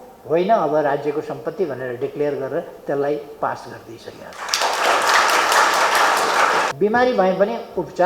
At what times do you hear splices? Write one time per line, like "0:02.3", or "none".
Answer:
0:06.7